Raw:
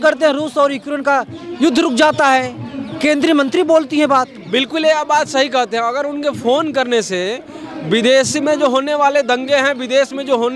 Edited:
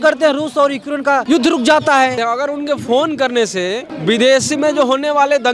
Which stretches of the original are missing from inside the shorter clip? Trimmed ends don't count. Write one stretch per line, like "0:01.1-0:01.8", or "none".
0:01.2-0:01.6
0:02.5-0:05.7
0:07.4-0:07.7